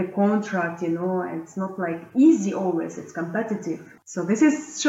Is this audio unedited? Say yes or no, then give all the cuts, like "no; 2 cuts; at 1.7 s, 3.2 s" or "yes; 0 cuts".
no; 1 cut; at 3.9 s